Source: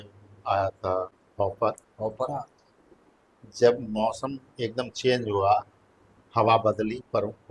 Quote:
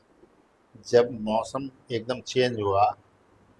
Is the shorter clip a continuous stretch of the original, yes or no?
yes